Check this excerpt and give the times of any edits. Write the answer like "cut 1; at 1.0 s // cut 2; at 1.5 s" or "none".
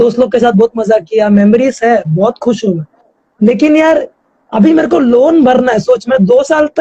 none